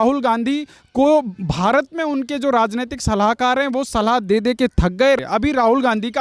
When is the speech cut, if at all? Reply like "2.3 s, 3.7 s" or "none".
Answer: 5.2 s

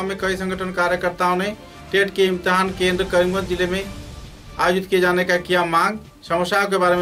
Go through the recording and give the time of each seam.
none

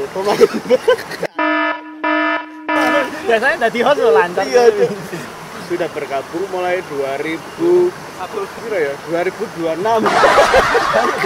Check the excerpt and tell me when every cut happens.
5.2 s, 8.6 s

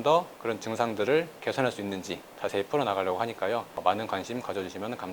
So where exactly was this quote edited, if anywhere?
2.4 s

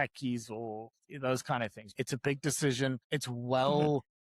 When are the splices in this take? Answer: 1.8 s, 3.0 s

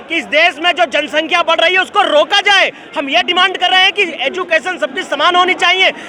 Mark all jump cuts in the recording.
none

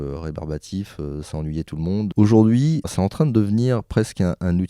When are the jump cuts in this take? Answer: 2.1 s, 2.9 s

